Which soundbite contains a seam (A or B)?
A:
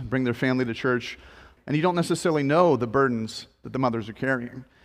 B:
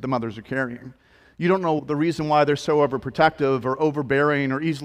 A